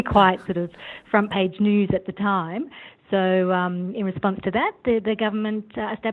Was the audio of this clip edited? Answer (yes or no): no